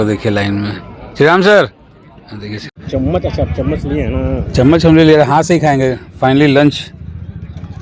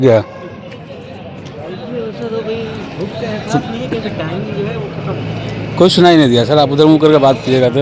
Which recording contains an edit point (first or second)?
first